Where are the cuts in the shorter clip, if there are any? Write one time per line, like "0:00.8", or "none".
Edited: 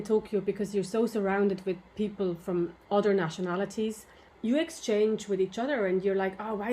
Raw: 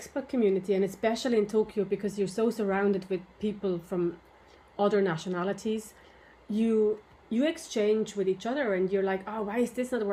0:02.8
0:04.3